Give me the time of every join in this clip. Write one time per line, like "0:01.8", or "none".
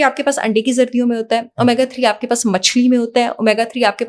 none